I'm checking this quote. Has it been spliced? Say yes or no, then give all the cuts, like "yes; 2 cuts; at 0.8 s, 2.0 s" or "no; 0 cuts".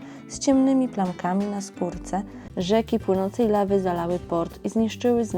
yes; 1 cut; at 2.4 s